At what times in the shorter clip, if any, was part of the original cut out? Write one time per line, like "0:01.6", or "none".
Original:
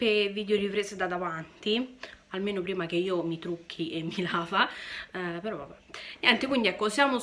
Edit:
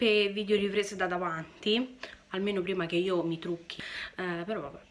0:03.7